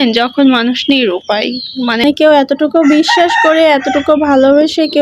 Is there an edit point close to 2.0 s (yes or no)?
yes